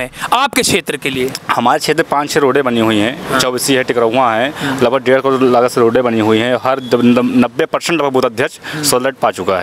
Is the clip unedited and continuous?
yes; 0 cuts

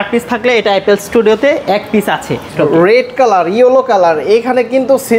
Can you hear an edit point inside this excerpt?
yes; 1 cut; at 2.5 s

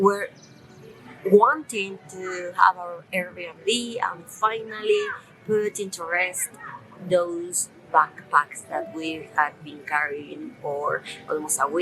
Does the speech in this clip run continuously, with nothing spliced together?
yes; 0 cuts

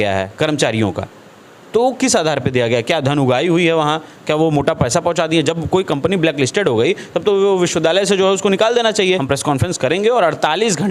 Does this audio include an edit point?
yes; 1 cut; at 9.2 s

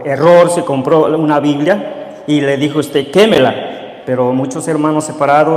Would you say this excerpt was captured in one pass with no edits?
yes; 0 cuts

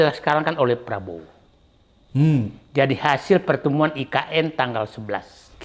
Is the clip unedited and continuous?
yes; 0 cuts

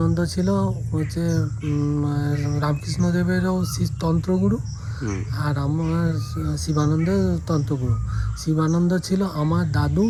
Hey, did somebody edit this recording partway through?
no; 0 cuts

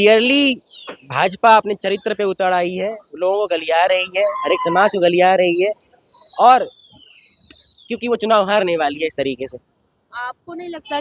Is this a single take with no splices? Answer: yes; 0 cuts

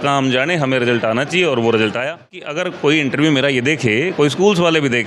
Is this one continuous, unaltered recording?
no; 1 cut; at 2.6 s

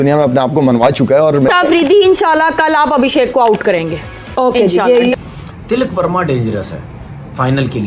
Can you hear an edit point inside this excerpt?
yes; 2 cuts; at 1.5 s, 5.1 s

